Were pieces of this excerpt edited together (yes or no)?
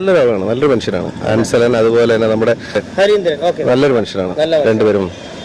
no